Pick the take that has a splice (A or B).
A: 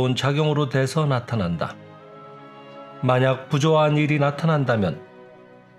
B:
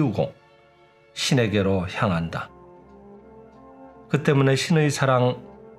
B